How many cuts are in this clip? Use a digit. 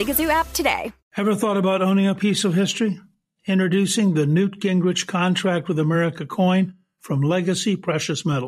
1